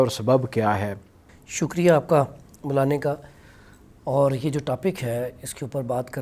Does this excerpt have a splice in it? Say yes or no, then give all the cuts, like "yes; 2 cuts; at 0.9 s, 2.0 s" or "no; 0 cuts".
no; 0 cuts